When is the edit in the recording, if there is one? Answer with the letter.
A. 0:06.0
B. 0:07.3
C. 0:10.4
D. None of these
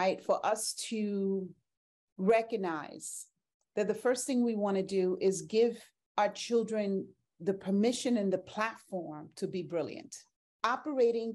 C